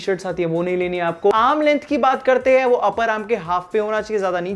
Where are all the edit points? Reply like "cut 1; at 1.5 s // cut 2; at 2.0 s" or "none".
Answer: cut 1; at 1.3 s

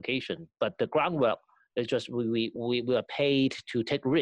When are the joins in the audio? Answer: cut 1; at 2.5 s

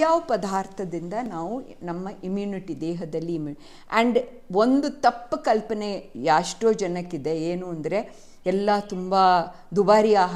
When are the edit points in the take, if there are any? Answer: none

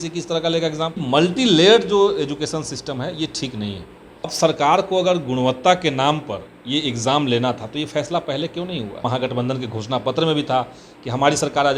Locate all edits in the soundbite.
cut 1; at 1.0 s // cut 2; at 4.3 s // cut 3; at 9.0 s

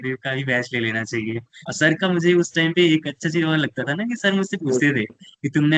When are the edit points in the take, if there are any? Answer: cut 1; at 1.7 s

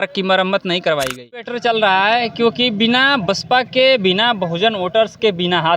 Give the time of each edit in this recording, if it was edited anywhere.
cut 1; at 1.5 s

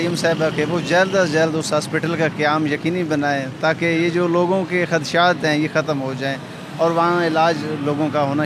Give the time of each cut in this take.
none

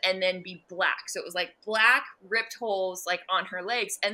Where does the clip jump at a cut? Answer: none

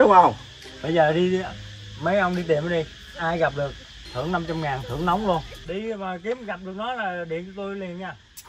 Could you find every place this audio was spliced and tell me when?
cut 1; at 5.6 s

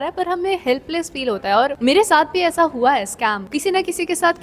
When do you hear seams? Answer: cut 1; at 1.8 s // cut 2; at 3.4 s

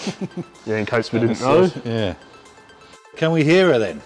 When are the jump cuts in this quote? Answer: cut 1; at 3.1 s

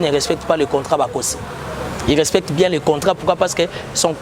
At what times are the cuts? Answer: none

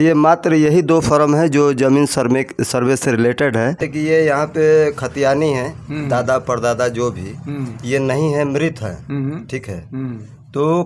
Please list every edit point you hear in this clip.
cut 1; at 3.8 s

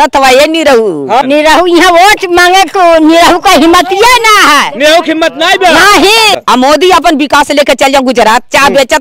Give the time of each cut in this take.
cut 1; at 1.2 s // cut 2; at 6.4 s

